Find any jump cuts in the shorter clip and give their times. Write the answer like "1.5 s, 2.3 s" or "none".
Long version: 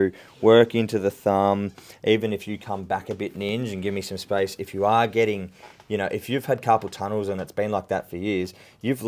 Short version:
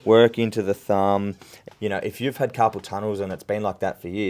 1.5 s